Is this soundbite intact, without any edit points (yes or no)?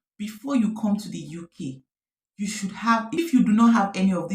no